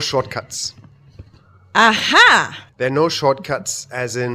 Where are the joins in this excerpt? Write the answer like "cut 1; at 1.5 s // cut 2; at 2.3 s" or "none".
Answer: cut 1; at 2.6 s